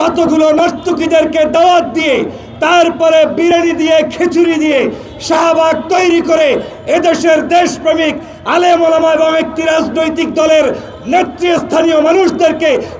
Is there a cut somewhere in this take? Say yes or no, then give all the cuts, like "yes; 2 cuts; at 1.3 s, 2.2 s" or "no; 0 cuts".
no; 0 cuts